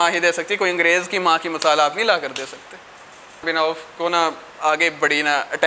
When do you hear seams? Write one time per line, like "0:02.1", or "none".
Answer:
0:03.4